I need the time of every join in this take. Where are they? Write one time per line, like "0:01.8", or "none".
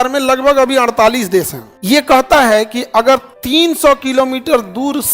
0:01.7
0:03.3